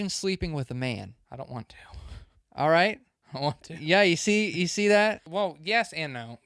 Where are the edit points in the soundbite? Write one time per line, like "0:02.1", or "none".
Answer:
0:05.2